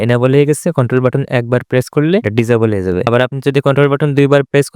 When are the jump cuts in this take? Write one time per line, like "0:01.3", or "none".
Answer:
none